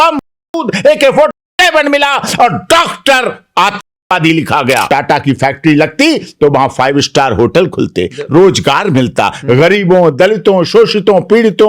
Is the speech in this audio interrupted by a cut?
yes; 1 cut; at 4.9 s

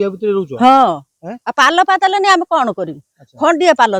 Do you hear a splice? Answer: no; 0 cuts

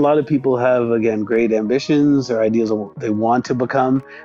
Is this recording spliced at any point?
no; 0 cuts

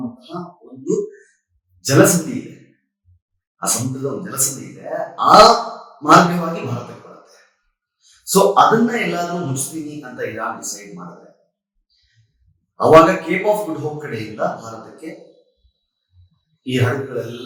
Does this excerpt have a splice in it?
no; 0 cuts

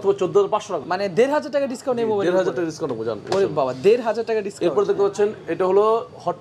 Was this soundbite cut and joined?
no; 0 cuts

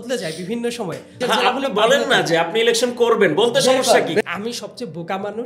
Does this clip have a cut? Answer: yes; 2 cuts; at 1.1 s, 4.2 s

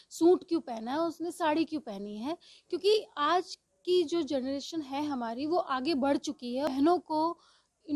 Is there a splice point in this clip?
yes; 1 cut; at 6.7 s

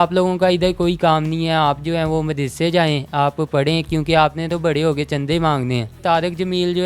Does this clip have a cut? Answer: yes; 1 cut; at 6.0 s

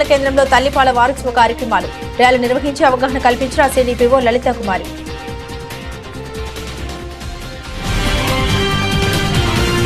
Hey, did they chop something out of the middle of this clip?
yes; 1 cut; at 5.2 s

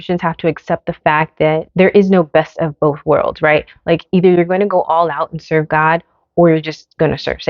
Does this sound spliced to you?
yes; 1 cut; at 1.7 s

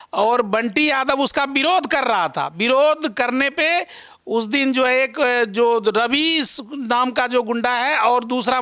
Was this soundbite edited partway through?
no; 0 cuts

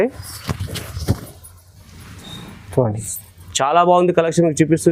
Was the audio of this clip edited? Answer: no; 0 cuts

